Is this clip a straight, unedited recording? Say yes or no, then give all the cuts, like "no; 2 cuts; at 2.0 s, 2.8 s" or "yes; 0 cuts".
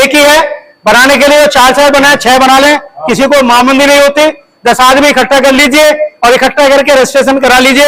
yes; 0 cuts